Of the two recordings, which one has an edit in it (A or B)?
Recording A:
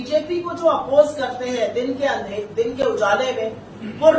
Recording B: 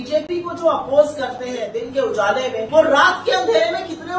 B